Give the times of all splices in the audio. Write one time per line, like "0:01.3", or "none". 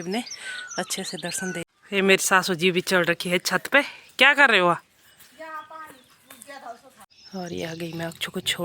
0:01.7
0:07.0

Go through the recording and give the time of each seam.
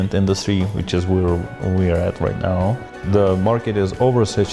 0:02.9

